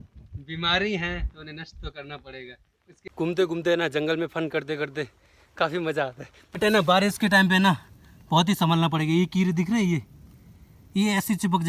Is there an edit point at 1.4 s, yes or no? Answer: no